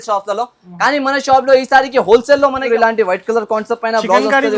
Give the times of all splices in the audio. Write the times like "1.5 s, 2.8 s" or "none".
2.7 s